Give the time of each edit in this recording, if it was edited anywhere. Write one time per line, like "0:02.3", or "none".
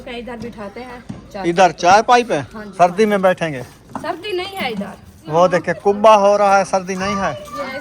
0:02.6
0:05.1